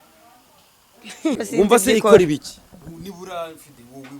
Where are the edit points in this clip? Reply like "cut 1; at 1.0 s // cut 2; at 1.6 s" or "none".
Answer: cut 1; at 1.4 s